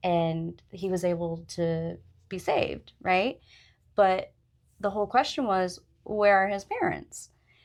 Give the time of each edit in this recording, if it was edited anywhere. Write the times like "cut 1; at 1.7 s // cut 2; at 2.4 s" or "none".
none